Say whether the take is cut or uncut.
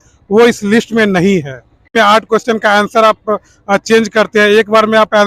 cut